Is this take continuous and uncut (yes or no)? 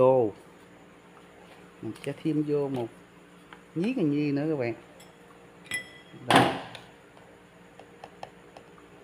yes